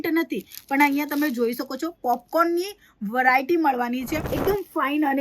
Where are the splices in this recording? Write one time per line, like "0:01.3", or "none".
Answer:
0:04.2